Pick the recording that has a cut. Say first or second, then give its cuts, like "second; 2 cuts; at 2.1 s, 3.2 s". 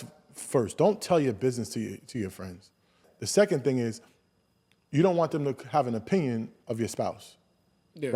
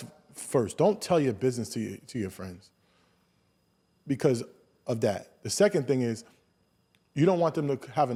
first; 1 cut; at 3.1 s